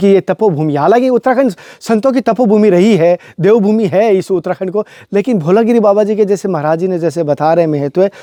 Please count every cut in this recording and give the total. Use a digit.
0